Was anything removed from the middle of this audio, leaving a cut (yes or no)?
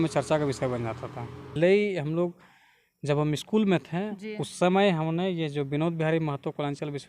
yes